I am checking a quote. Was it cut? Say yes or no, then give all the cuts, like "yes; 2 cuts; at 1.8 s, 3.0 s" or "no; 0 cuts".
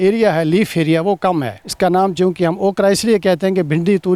no; 0 cuts